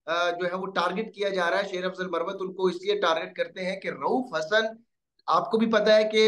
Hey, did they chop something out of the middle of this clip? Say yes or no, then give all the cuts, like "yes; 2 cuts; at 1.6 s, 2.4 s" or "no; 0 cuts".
no; 0 cuts